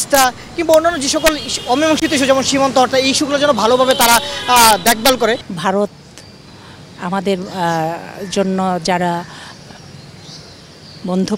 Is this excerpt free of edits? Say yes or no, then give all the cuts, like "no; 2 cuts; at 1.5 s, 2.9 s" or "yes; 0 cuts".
no; 1 cut; at 5.5 s